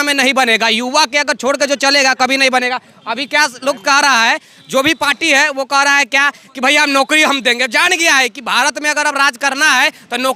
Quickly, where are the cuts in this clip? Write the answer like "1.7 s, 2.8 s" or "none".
none